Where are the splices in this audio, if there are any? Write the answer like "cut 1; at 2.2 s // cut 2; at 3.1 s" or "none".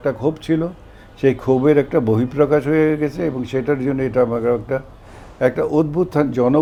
none